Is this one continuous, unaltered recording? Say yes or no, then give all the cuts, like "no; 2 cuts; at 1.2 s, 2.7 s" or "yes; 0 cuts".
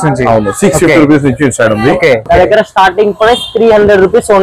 no; 1 cut; at 2.2 s